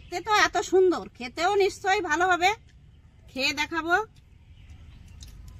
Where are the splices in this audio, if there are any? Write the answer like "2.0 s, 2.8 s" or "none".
4.4 s